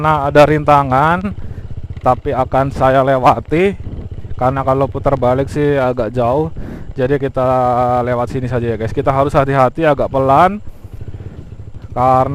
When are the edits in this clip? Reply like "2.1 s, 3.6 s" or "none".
none

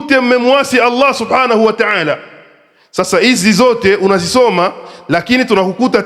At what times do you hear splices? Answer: none

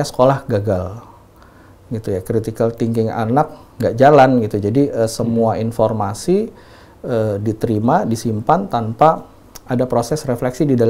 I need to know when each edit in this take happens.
none

